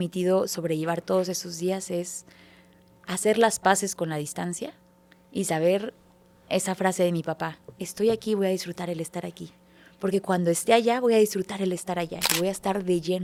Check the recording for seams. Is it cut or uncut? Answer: uncut